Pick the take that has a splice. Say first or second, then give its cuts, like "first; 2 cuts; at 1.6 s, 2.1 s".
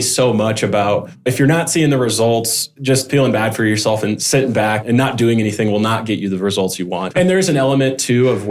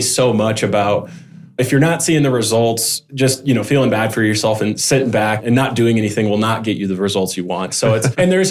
first; 3 cuts; at 1.1 s, 3.1 s, 7.1 s